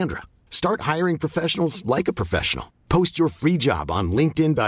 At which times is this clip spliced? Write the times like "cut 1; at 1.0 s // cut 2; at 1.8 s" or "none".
none